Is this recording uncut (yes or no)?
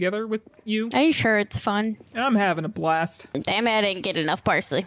no